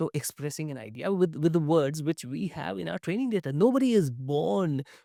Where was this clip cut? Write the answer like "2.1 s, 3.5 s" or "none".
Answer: none